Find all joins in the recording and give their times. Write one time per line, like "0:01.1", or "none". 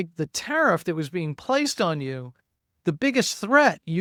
none